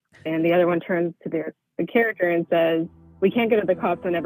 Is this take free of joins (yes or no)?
no